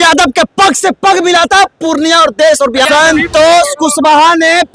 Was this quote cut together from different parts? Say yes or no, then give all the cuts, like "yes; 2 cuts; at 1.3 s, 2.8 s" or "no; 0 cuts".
yes; 1 cut; at 2.9 s